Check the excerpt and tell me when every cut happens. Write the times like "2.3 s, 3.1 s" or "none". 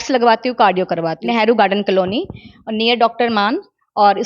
1.1 s